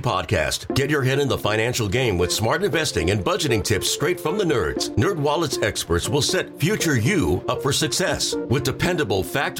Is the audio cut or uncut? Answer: uncut